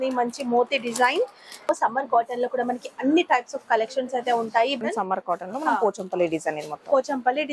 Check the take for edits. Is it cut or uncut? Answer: cut